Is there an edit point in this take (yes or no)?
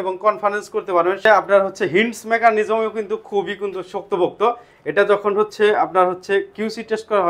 yes